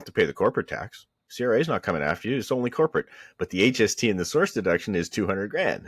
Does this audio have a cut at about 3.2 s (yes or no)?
no